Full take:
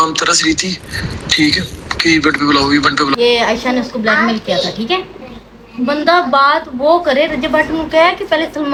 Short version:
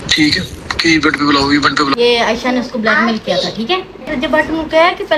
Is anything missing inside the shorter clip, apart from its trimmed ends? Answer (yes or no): yes